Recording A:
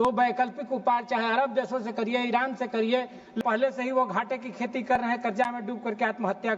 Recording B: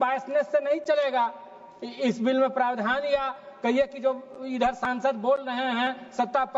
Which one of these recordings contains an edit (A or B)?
A